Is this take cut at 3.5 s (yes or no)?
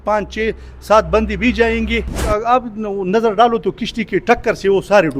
no